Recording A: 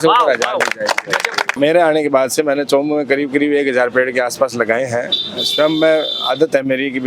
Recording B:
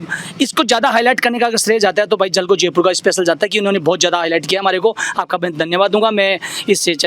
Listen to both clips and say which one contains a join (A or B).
A